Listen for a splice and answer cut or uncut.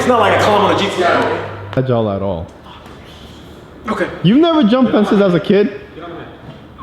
cut